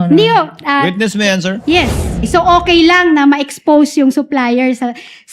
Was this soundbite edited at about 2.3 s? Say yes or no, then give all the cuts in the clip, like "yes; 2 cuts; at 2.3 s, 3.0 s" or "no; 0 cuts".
yes; 1 cut; at 2.3 s